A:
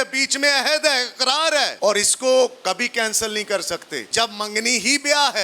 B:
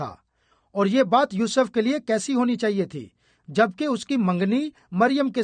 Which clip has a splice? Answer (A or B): A